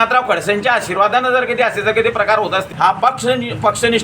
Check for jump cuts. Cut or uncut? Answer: cut